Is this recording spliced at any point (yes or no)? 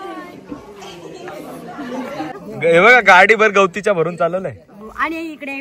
yes